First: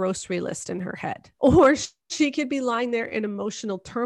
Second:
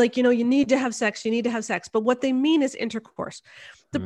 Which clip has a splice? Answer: first; 1 cut; at 1.3 s

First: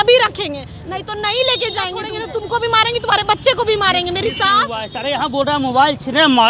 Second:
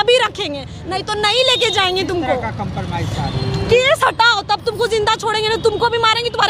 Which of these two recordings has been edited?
first; 2 cuts; at 2.0 s, 4.9 s

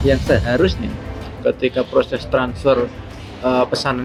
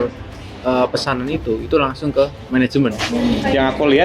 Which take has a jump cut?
second; 1 cut; at 3.1 s

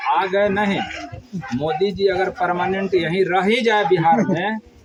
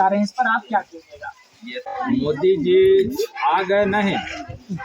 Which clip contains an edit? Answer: second; 1 cut; at 1.8 s

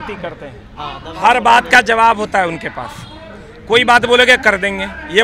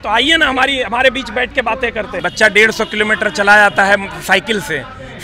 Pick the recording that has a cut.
second; 1 cut; at 2.1 s

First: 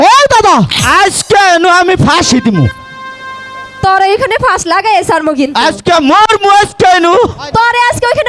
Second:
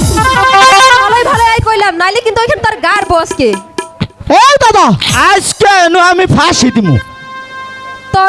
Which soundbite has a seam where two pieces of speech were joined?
second; 1 cut; at 1.1 s

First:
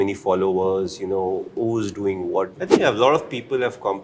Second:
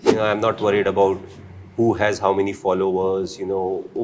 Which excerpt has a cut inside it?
first; 1 cut; at 2.6 s

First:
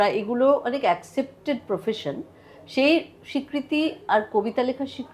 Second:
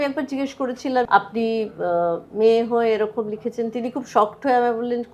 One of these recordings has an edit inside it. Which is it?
second; 1 cut; at 1.1 s

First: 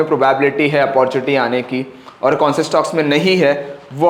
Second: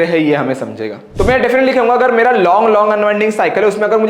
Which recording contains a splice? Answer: second; 1 cut; at 1.0 s

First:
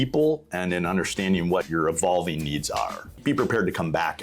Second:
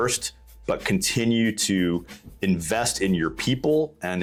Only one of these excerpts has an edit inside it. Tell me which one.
first; 2 cuts; at 1.7 s, 3.2 s

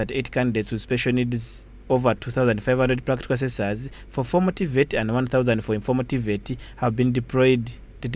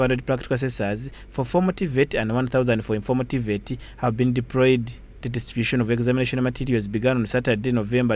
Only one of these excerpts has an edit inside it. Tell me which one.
first; 1 cut; at 1.7 s

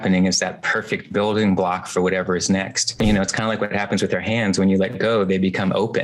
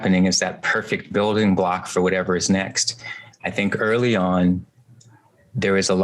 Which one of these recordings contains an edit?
first; 1 cut; at 3.0 s

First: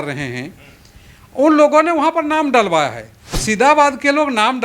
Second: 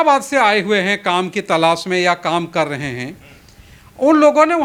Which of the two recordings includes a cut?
first; 1 cut; at 3.4 s

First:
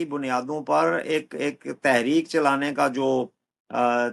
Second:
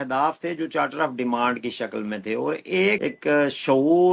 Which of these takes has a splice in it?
second; 1 cut; at 3.0 s

